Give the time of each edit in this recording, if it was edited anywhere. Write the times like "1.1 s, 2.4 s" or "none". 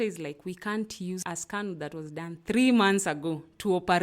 1.2 s